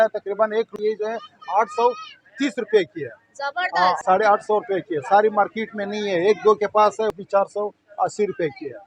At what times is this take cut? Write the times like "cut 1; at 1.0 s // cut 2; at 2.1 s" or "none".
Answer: cut 1; at 0.8 s // cut 2; at 4.0 s // cut 3; at 7.1 s